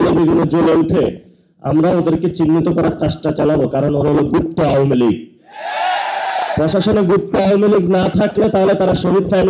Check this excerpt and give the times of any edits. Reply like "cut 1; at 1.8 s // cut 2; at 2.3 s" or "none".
none